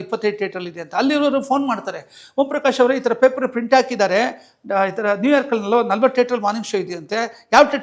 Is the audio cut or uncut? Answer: uncut